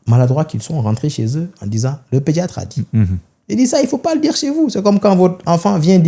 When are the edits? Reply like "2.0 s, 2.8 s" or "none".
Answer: none